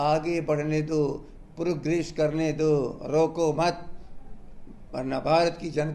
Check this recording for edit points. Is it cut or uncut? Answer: uncut